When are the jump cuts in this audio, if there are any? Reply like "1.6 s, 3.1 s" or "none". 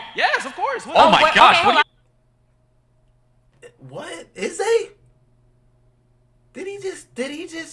1.8 s